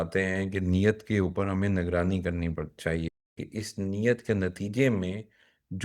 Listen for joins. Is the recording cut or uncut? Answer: cut